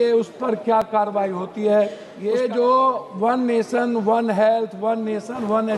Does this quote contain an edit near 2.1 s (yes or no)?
yes